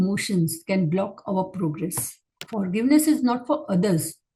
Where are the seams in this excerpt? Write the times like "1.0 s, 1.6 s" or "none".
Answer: 2.4 s